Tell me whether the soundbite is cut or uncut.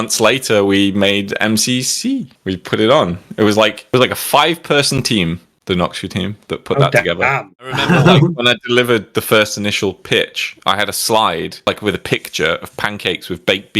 cut